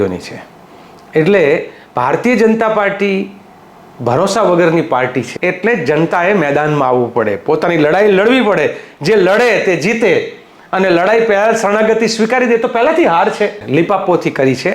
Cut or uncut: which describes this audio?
cut